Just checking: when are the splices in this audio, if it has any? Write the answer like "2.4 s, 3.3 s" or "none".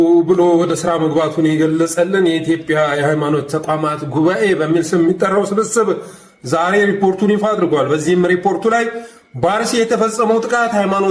none